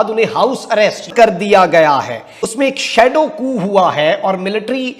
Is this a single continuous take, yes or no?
no